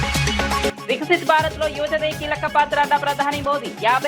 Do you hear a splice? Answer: no; 0 cuts

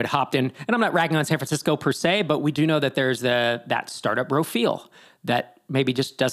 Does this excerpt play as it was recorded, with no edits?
yes; 0 cuts

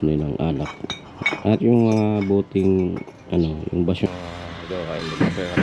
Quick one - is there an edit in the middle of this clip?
yes; 1 cut; at 4.1 s

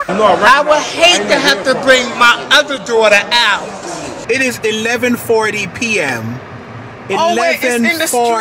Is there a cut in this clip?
yes; 1 cut; at 4.2 s

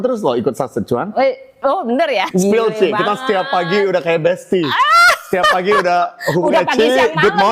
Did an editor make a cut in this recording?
yes; 1 cut; at 2.3 s

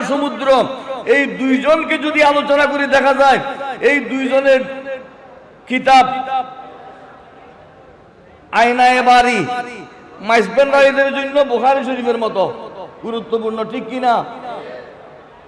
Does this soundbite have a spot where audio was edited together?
no; 0 cuts

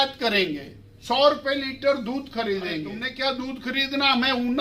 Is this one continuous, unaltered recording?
no; 1 cut; at 3.0 s

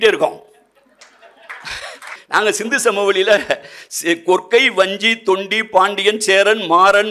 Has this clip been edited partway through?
yes; 1 cut; at 2.1 s

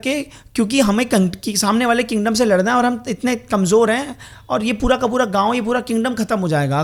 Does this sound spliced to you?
no; 0 cuts

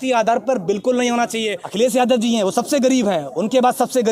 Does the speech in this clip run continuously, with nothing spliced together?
no; 1 cut; at 1.6 s

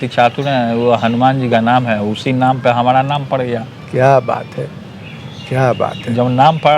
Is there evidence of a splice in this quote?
no; 0 cuts

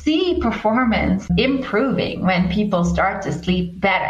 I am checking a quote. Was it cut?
yes; 1 cut; at 1.3 s

